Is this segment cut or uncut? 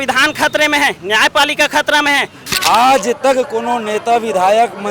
cut